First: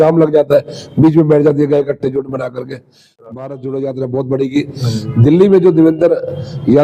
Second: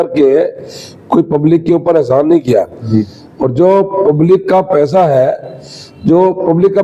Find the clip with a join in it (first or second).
first